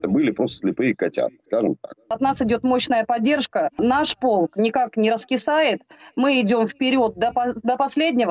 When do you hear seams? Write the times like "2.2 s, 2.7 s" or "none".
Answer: 2.1 s, 3.8 s